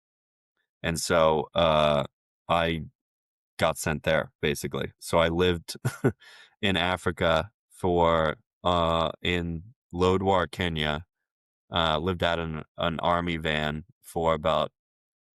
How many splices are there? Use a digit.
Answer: 0